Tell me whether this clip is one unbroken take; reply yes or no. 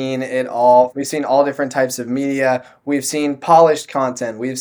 no